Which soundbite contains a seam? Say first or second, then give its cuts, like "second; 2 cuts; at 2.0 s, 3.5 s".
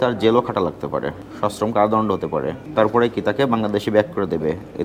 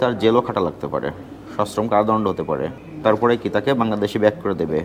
first; 2 cuts; at 1.2 s, 2.6 s